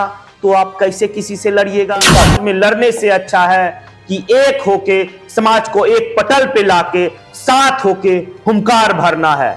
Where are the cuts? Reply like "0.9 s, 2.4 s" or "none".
2.4 s